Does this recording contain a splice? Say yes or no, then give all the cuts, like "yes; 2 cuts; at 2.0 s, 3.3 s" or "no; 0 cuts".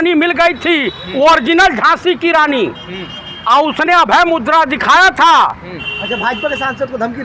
no; 0 cuts